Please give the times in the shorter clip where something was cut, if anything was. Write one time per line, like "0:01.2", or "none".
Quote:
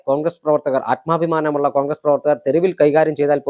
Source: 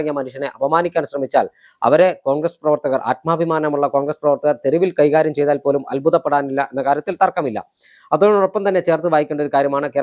none